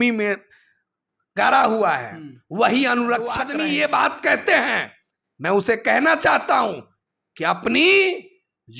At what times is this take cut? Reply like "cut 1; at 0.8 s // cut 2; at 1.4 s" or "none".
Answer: cut 1; at 3.5 s